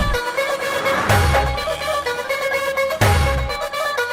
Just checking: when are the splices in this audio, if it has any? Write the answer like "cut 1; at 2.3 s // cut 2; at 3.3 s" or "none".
none